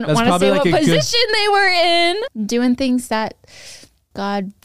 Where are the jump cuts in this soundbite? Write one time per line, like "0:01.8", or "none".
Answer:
0:02.3